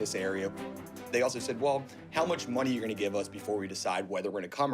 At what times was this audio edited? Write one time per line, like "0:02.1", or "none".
0:01.1

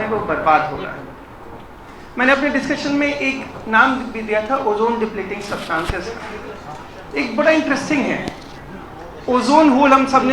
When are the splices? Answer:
none

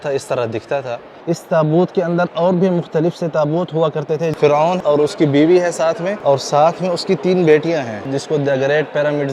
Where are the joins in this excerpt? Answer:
0:01.1
0:04.8
0:06.1
0:08.1

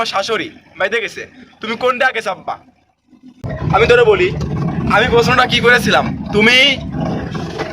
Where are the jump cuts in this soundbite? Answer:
0:03.2

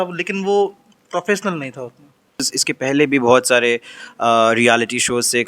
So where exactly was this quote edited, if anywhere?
0:02.5

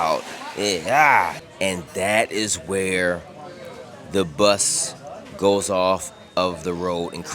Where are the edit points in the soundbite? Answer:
0:01.4

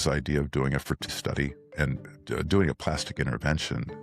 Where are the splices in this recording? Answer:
0:01.0

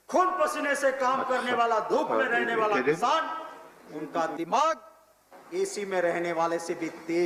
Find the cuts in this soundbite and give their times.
none

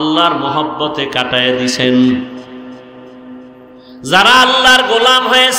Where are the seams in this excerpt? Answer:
0:04.0

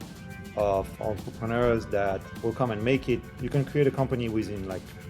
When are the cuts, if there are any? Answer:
0:01.0
0:02.3
0:03.3

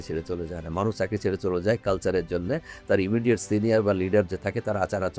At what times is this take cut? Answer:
none

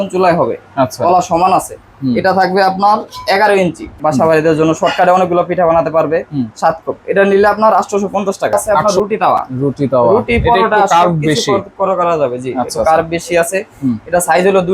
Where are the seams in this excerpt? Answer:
0:04.0
0:08.8

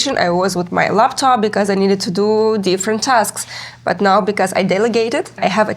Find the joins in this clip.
none

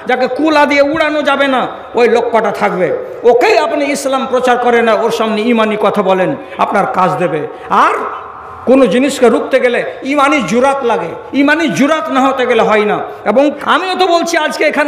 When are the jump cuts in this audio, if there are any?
0:13.6

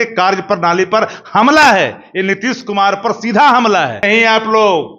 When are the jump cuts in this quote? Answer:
0:04.0

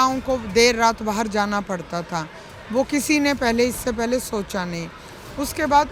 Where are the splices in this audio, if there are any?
none

